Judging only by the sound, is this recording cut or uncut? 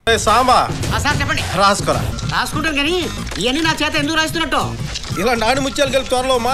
uncut